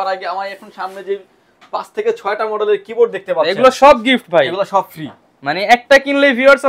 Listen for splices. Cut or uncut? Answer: uncut